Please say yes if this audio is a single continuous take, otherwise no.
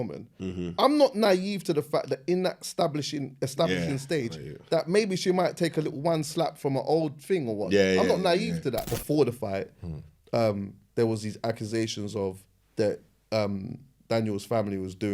no